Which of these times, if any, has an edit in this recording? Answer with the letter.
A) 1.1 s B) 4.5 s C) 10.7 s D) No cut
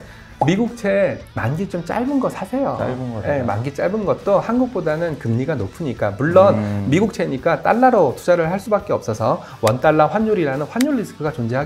D